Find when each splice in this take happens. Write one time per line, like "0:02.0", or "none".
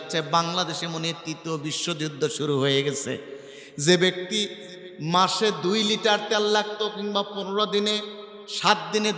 none